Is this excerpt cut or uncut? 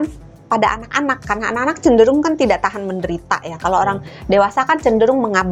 uncut